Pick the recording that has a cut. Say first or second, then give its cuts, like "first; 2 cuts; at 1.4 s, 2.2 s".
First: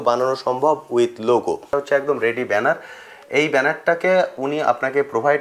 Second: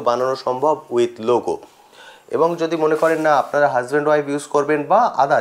first; 1 cut; at 1.7 s